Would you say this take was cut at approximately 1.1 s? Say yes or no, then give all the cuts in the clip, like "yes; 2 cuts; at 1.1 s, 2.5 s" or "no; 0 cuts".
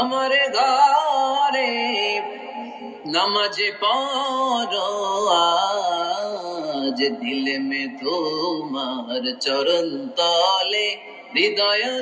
no; 0 cuts